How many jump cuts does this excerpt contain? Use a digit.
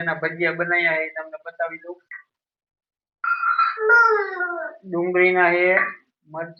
0